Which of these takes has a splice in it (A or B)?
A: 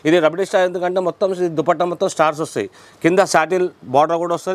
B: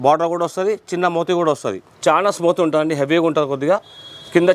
B